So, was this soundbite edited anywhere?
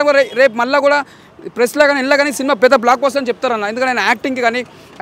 no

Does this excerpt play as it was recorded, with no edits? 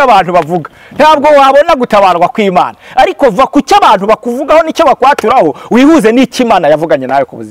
yes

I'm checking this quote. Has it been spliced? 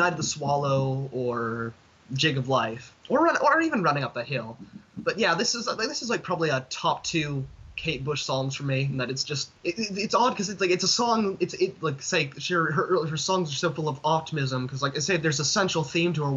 yes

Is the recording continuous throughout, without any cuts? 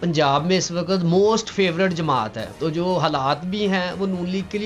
no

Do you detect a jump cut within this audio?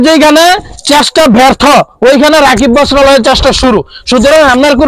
no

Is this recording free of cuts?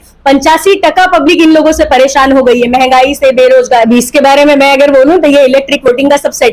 no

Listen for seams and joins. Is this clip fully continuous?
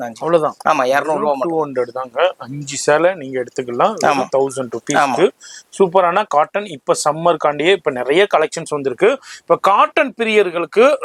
yes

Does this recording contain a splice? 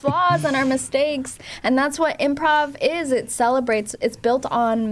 no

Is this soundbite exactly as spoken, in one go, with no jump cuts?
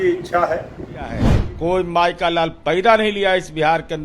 no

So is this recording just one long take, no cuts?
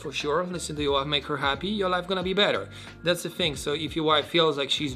yes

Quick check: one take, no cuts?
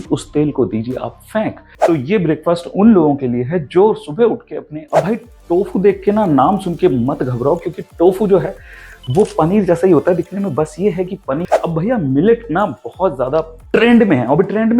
no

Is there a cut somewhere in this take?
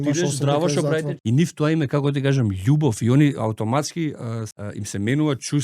yes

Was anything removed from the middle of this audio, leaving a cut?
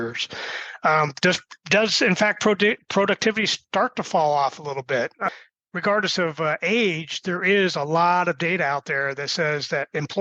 yes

